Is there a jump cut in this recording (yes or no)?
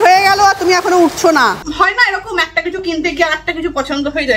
yes